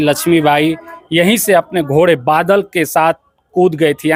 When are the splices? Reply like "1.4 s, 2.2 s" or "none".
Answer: none